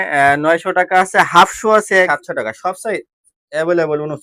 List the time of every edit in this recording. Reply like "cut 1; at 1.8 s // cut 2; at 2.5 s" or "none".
cut 1; at 2.1 s